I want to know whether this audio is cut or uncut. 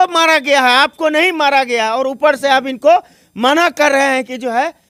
uncut